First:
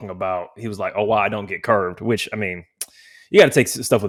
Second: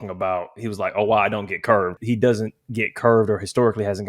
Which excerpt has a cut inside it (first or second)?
second